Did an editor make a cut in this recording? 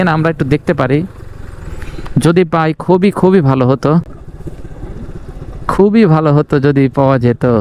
no; 0 cuts

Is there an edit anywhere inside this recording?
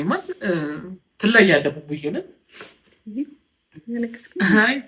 no; 0 cuts

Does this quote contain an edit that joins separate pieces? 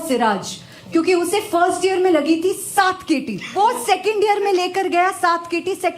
yes; 1 cut; at 3.5 s

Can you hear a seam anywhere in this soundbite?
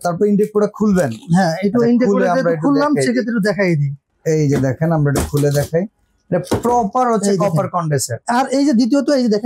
yes; 1 cut; at 4.1 s

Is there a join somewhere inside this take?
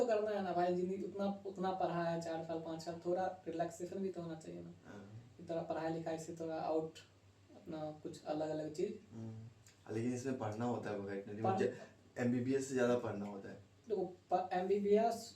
no; 0 cuts

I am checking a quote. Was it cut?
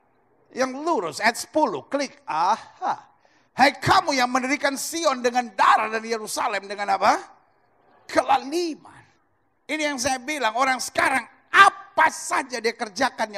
no; 0 cuts

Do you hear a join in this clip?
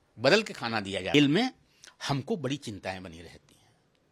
yes; 1 cut; at 1.1 s

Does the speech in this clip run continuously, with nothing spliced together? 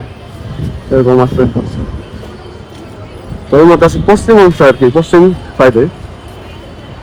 yes; 0 cuts

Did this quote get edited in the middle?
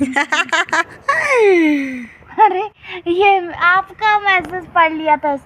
no; 0 cuts

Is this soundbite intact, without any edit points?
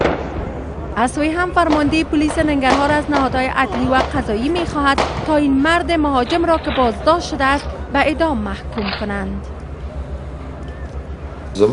yes; 0 cuts

